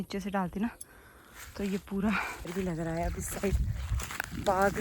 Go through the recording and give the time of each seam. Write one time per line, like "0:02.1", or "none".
0:02.5